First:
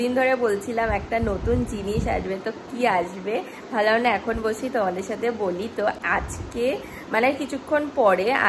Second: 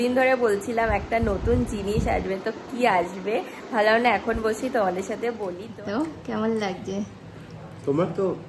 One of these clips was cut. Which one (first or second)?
second